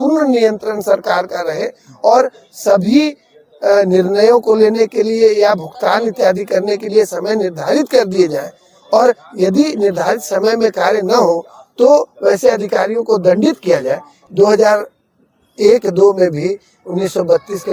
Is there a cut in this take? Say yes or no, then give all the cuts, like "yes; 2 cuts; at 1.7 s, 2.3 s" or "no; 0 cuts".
yes; 1 cut; at 14.1 s